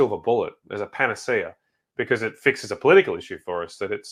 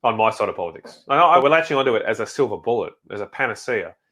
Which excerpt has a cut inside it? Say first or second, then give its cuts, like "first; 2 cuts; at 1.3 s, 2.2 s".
second; 1 cut; at 1.4 s